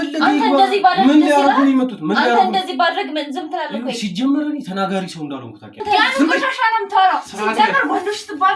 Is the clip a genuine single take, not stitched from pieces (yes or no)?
no